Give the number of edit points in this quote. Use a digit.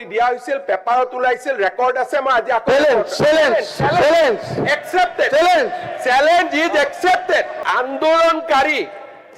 1